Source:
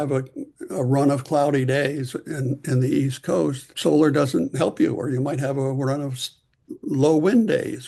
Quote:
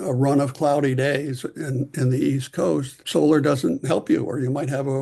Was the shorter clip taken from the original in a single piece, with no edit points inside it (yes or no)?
yes